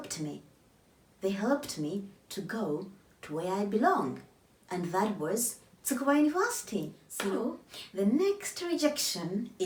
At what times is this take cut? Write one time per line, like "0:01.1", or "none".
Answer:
none